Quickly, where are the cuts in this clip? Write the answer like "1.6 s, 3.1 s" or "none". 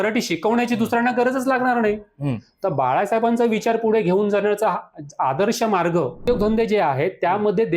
6.2 s